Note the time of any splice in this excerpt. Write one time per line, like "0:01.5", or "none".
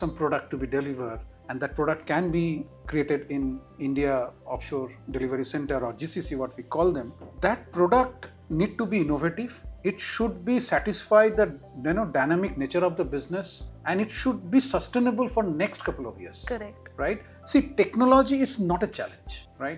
none